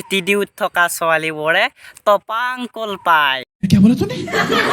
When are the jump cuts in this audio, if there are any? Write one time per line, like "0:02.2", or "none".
0:03.5